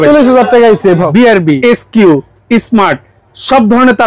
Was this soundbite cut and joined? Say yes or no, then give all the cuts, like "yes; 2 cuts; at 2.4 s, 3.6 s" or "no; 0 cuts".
yes; 1 cut; at 1.2 s